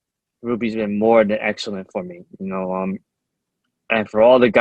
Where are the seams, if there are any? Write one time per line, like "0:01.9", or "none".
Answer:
none